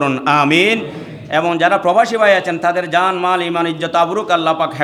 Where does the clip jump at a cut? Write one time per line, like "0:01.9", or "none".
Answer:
none